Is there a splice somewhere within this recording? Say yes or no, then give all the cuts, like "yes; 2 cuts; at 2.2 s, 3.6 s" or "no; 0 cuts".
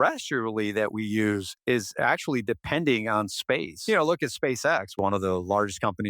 yes; 3 cuts; at 1.5 s, 3.7 s, 4.9 s